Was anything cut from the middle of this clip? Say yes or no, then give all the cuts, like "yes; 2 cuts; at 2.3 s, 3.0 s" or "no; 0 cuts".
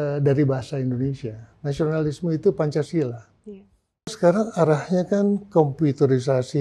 yes; 1 cut; at 4.1 s